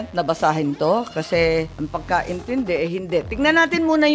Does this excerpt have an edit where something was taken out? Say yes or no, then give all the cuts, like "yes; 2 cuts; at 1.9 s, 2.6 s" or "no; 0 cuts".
yes; 1 cut; at 1.8 s